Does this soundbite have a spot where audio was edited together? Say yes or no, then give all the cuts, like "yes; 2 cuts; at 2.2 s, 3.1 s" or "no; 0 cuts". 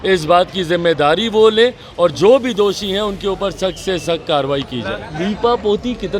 yes; 1 cut; at 5.1 s